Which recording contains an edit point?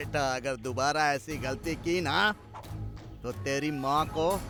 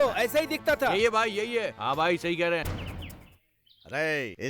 second; 1 cut; at 2.7 s

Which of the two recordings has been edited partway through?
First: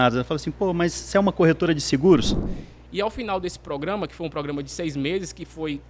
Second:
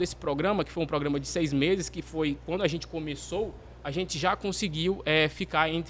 first; 1 cut; at 2.4 s

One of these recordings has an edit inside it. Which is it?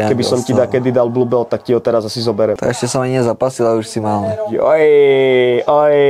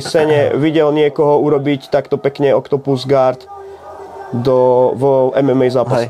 first; 2 cuts; at 2.6 s, 4.5 s

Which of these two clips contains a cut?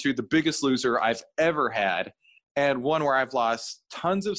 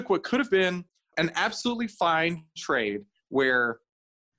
second; 1 cut; at 1.1 s

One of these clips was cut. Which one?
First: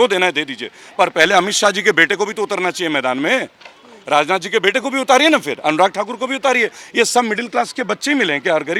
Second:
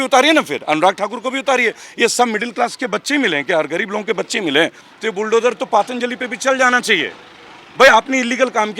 second; 1 cut; at 4.8 s

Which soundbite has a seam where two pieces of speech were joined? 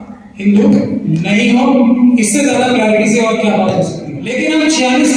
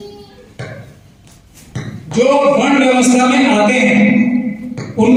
first; 1 cut; at 4.2 s

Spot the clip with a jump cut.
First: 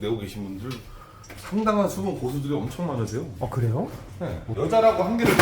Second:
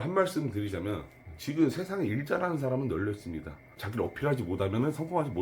first; 1 cut; at 4.5 s

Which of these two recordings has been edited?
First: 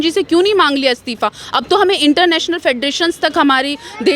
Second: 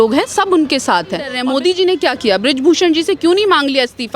second; 1 cut; at 1.4 s

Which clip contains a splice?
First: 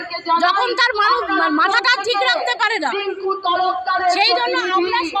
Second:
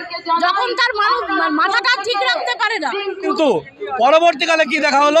second; 1 cut; at 3.3 s

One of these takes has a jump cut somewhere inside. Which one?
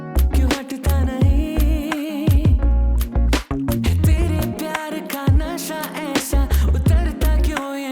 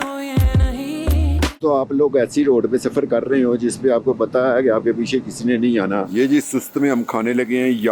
second; 2 cuts; at 1.6 s, 6.1 s

